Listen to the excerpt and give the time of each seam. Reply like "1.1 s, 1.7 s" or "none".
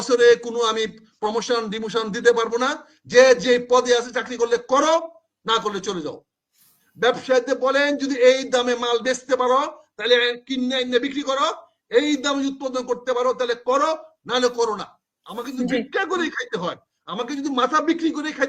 none